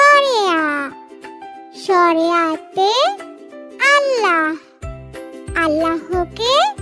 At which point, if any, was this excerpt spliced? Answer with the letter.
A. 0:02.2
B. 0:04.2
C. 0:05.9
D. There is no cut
D